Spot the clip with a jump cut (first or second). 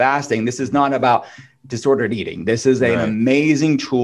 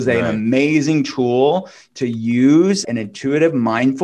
second